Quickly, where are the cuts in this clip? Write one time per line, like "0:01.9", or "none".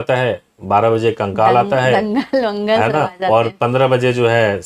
none

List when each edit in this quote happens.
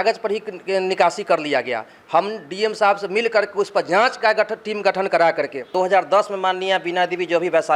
0:05.7

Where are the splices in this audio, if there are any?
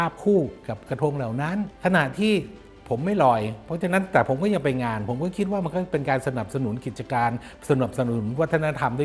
none

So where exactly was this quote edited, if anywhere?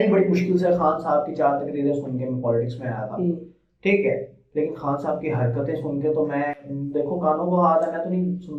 none

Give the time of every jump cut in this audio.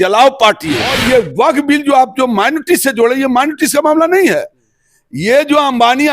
0:01.0

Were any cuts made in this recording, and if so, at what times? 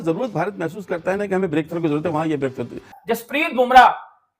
0:02.9

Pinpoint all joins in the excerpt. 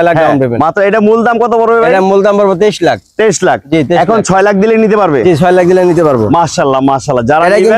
none

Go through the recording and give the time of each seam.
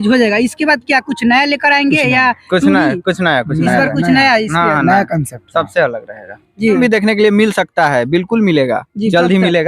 0:06.8

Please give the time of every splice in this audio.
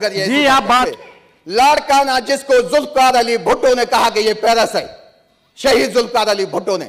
0:00.9

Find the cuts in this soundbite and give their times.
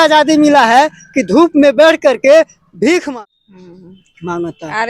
0:03.1

